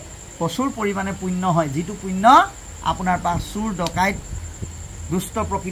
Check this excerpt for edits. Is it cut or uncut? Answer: uncut